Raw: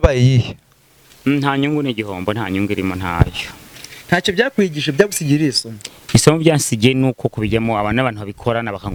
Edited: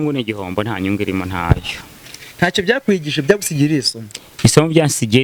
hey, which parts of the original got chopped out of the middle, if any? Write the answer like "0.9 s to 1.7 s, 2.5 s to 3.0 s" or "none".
none

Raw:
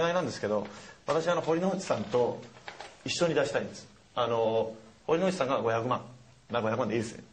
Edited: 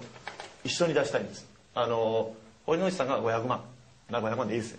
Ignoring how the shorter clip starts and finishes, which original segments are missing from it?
none

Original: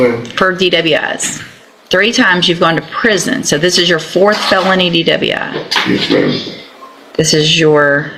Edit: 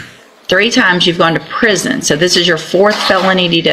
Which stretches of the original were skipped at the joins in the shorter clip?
none

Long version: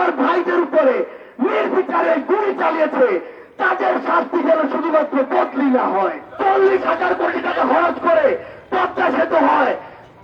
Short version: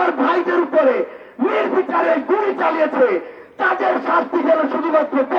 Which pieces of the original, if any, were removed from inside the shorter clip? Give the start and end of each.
none

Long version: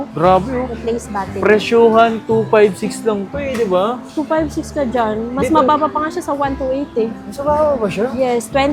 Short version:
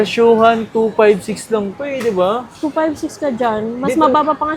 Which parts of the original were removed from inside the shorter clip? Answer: none

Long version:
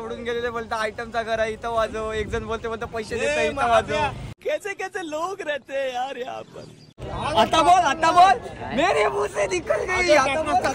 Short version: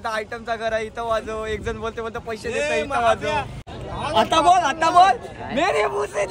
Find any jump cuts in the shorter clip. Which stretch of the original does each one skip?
4.3 s to 6.8 s

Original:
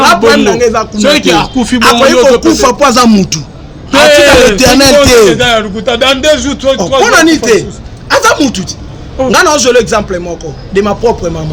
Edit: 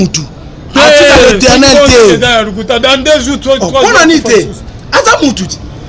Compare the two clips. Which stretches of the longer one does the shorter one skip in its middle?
none

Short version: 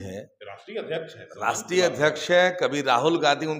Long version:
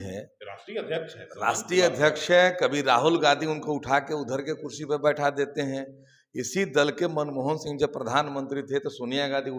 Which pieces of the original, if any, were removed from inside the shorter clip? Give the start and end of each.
none

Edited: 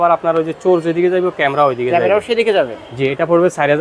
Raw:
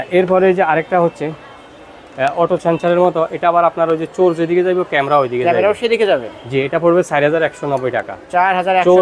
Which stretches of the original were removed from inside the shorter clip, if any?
none

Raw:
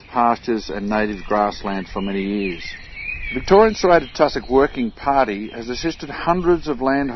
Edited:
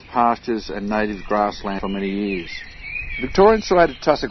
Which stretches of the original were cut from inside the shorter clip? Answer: 1.8 s to 1.9 s

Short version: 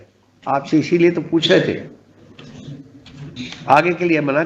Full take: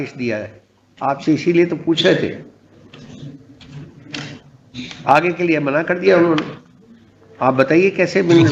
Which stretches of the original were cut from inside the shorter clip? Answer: 3.9 s to 4.7 s

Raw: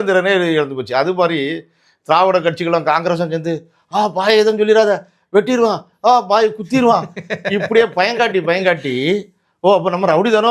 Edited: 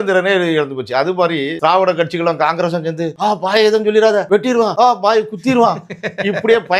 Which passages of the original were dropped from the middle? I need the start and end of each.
1.5 s to 2.0 s, 3.6 s to 3.8 s, 5.2 s to 5.8 s

